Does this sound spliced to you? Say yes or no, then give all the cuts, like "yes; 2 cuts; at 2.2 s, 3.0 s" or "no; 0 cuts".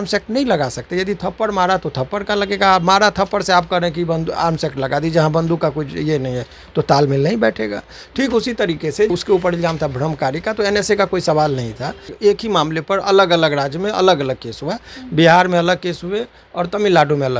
yes; 2 cuts; at 9.1 s, 12.1 s